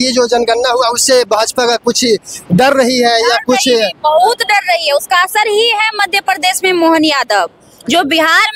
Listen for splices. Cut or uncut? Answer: uncut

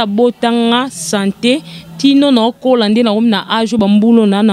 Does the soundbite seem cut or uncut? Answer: uncut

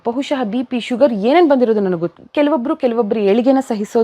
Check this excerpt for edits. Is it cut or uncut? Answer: cut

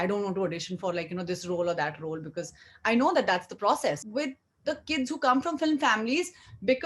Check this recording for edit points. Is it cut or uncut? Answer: cut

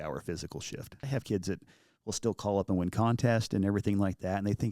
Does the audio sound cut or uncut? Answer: cut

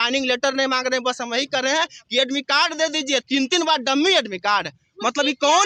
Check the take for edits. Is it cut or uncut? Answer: uncut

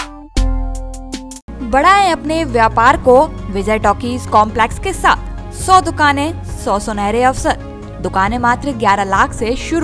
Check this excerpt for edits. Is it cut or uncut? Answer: uncut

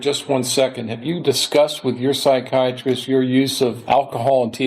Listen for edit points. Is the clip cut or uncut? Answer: cut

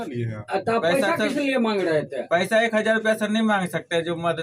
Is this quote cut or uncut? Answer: uncut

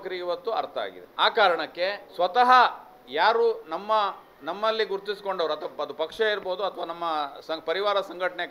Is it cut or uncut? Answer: uncut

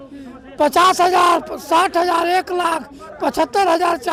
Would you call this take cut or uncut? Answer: uncut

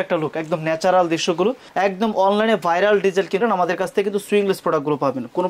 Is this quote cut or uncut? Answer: cut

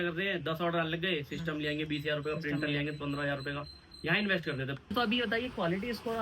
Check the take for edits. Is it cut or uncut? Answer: cut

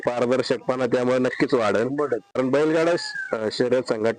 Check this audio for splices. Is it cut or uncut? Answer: cut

